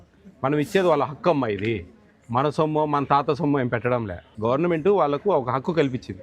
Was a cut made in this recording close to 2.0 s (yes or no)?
no